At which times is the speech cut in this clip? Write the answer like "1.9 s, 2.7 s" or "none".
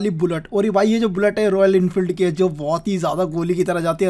none